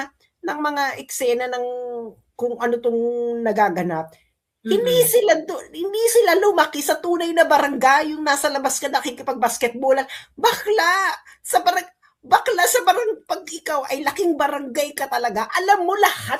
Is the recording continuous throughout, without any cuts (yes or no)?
yes